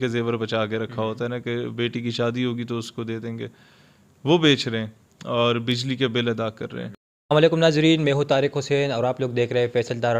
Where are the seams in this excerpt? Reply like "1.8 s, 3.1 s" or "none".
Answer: 6.8 s